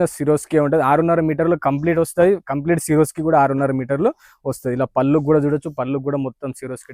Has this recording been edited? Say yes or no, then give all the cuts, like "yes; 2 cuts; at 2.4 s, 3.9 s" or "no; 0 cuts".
no; 0 cuts